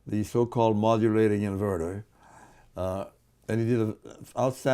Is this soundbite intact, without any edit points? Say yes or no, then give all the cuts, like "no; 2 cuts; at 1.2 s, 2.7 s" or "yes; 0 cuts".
yes; 0 cuts